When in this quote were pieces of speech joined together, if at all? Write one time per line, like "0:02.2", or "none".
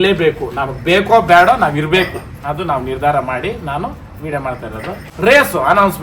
0:05.1